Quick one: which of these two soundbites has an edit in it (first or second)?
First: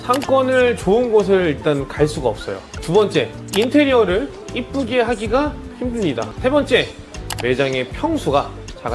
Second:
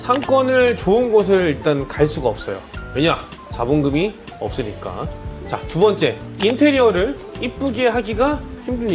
first